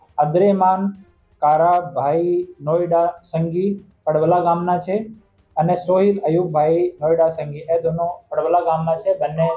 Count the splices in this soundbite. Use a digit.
0